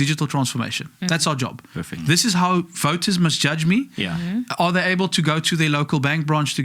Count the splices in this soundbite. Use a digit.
0